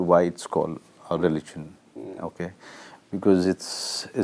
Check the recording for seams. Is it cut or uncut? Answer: uncut